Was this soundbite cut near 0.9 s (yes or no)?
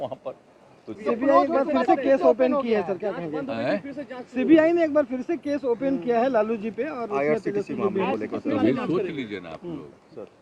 yes